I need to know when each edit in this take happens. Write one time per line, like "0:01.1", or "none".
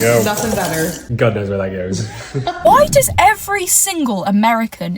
0:02.6